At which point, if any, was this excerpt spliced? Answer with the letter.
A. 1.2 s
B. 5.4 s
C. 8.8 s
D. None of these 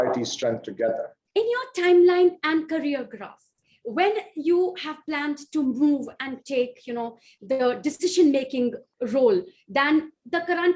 A